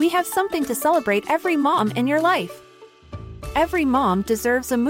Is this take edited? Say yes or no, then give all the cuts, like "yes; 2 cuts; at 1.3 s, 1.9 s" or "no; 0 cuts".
no; 0 cuts